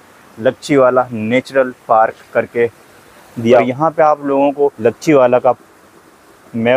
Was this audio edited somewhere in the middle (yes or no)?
yes